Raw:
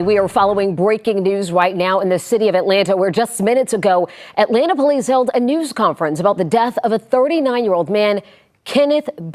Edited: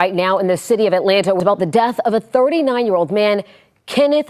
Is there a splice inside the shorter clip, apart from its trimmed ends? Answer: yes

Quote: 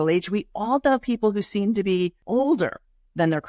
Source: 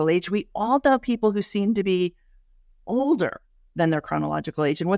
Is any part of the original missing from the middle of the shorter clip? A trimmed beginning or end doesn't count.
yes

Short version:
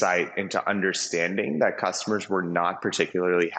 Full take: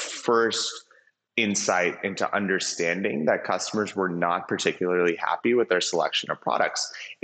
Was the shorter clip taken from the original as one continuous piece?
yes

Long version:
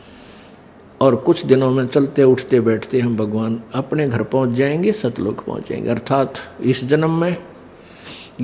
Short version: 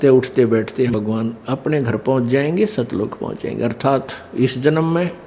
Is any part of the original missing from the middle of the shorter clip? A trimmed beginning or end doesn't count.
yes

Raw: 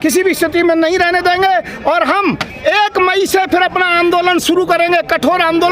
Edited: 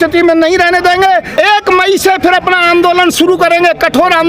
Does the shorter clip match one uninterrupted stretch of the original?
no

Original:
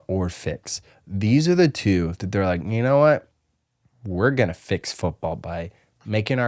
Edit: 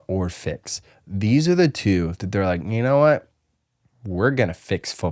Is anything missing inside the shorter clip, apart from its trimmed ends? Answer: no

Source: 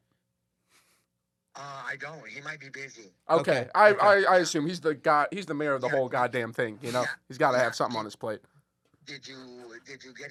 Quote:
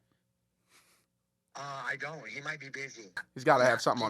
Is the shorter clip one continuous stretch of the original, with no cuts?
no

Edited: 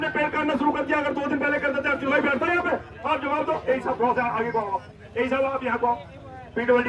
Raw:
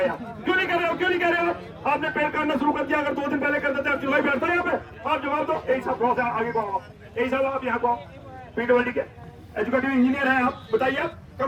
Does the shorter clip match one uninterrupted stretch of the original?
yes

